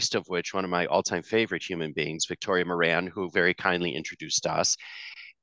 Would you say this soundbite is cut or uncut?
uncut